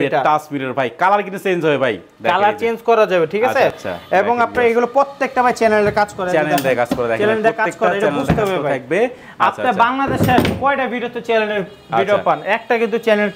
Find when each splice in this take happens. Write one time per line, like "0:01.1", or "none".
none